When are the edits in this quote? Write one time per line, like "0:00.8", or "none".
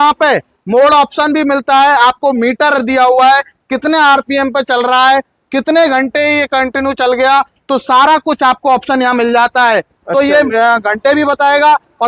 none